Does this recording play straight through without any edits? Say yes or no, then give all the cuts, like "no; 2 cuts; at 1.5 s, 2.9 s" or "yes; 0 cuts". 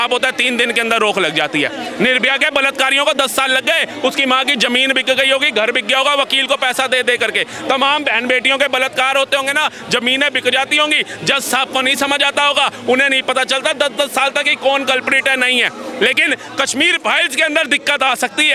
yes; 0 cuts